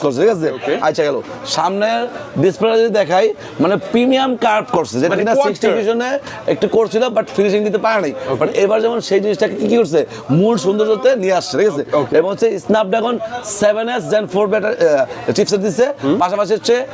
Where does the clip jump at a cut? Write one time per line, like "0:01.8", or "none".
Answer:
none